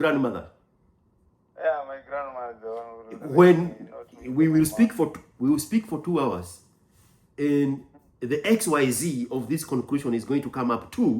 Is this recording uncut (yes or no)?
yes